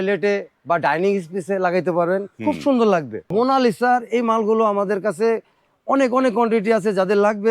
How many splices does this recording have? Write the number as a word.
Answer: one